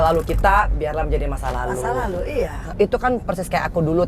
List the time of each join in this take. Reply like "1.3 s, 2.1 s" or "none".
2.7 s